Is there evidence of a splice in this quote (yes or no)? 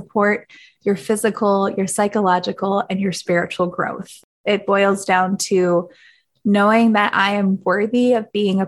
yes